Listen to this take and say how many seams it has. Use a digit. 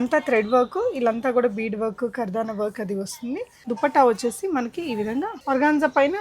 2